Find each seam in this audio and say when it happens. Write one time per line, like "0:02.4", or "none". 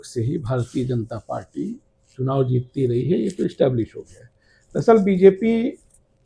none